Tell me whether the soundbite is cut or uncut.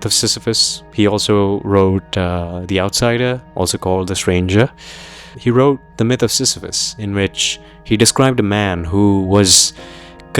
cut